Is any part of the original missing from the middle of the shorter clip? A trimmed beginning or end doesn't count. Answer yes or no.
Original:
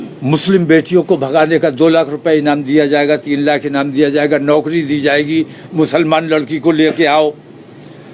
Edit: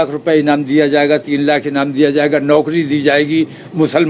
no